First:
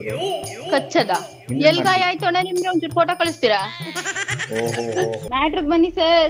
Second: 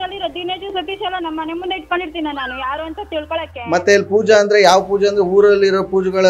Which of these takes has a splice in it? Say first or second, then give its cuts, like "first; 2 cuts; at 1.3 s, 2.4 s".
first; 1 cut; at 5.2 s